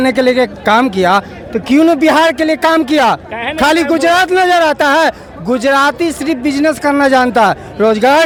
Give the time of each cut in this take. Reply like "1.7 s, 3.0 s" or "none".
none